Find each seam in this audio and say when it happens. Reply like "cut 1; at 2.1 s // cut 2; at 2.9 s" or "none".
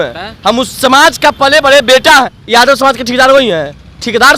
cut 1; at 2.4 s